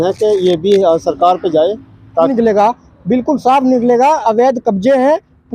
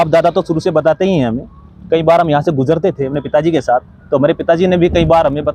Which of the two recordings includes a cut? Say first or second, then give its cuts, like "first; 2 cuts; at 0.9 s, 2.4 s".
first; 1 cut; at 2.3 s